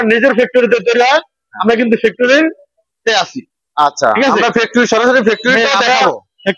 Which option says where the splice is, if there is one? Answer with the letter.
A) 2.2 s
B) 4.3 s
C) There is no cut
C